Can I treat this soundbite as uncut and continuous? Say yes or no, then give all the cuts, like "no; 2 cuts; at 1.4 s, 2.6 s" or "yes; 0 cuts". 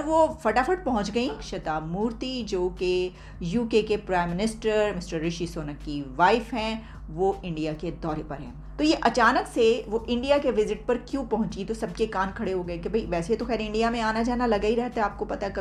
yes; 0 cuts